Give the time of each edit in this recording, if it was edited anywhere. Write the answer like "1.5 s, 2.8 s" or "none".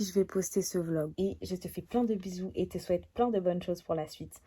1.1 s